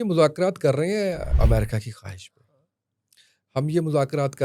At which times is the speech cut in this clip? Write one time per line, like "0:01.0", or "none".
0:01.3